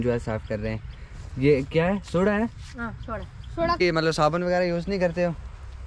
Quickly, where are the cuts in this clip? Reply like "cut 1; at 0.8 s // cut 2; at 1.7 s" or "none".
cut 1; at 3.8 s